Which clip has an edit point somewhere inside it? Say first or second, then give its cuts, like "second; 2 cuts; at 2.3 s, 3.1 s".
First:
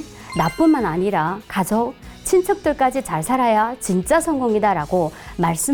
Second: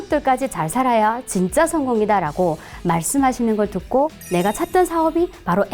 second; 1 cut; at 4.2 s